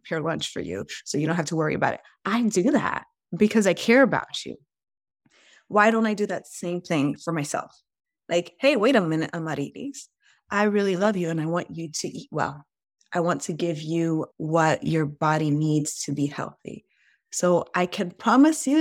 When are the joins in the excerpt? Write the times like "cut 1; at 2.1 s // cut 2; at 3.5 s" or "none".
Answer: cut 1; at 14.3 s